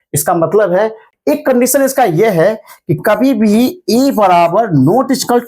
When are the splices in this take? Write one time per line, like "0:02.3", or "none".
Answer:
0:01.0